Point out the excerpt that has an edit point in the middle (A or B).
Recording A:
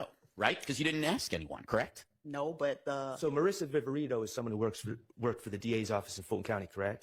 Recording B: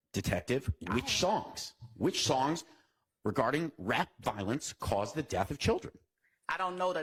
A